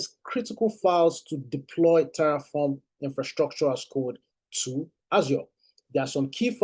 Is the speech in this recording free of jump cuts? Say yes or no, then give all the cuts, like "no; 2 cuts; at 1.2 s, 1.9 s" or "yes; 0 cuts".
yes; 0 cuts